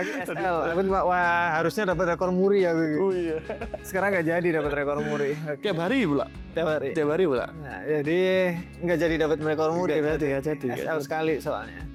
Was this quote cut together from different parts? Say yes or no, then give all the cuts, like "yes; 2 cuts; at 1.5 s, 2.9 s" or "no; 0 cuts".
no; 0 cuts